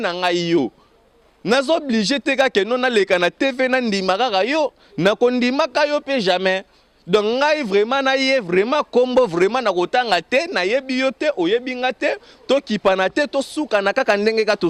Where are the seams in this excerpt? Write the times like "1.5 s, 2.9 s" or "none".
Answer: none